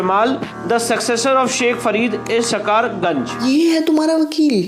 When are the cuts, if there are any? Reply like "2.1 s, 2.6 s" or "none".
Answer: 3.4 s